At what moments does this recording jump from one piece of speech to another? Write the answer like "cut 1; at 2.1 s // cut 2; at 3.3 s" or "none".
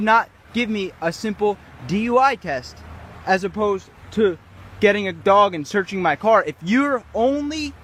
none